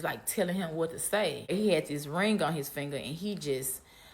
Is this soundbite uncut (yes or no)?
no